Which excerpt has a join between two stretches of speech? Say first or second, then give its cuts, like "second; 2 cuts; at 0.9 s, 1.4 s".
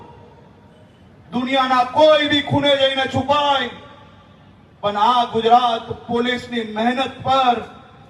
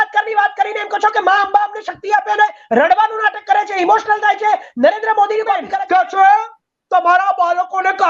second; 1 cut; at 5.7 s